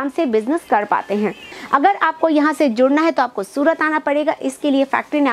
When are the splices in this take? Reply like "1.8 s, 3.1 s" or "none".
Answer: 1.6 s